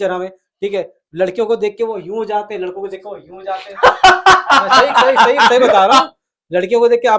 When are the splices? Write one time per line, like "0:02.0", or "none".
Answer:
none